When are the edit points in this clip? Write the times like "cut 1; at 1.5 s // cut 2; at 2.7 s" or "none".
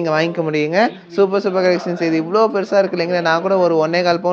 none

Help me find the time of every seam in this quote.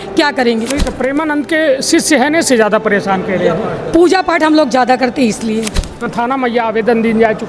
cut 1; at 6.1 s

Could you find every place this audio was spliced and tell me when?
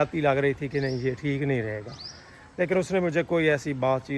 none

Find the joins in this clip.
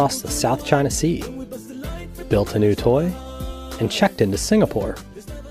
cut 1; at 3.2 s

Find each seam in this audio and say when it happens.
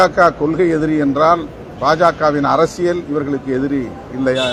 none

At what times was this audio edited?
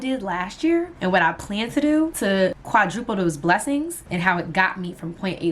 cut 1; at 0.9 s // cut 2; at 2.6 s // cut 3; at 4.0 s

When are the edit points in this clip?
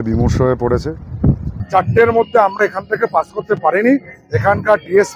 cut 1; at 1.5 s

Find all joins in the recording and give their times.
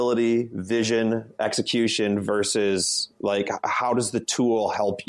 none

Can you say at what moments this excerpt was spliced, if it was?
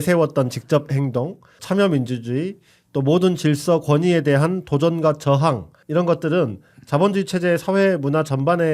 cut 1; at 1.5 s // cut 2; at 5.7 s

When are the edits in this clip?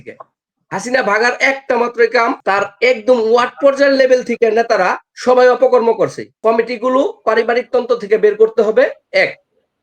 cut 1; at 2.4 s // cut 2; at 6.3 s

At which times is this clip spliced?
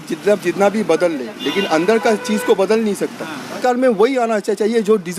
cut 1; at 3.6 s

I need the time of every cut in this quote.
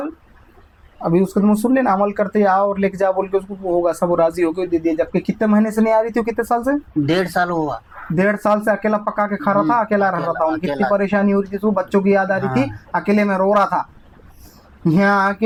none

